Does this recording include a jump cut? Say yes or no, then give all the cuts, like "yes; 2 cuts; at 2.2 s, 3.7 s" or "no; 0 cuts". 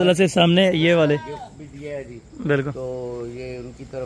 no; 0 cuts